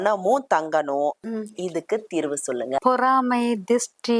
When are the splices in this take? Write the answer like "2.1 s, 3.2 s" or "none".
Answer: 1.3 s, 2.8 s